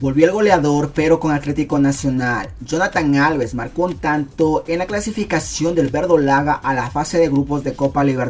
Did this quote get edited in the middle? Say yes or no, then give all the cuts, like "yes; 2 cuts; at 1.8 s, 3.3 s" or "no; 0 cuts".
no; 0 cuts